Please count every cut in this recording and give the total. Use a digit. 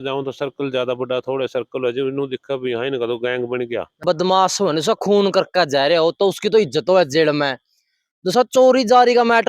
1